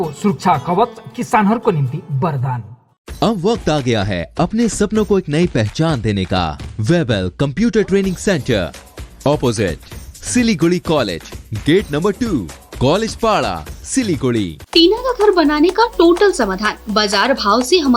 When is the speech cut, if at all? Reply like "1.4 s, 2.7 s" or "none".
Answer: 6.6 s, 14.6 s